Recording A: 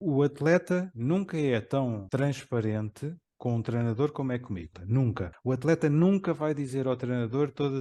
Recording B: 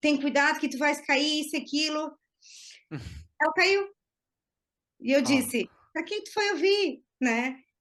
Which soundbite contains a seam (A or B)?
A